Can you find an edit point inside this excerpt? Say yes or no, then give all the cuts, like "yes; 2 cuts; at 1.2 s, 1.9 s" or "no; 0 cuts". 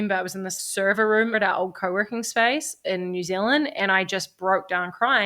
yes; 1 cut; at 1.3 s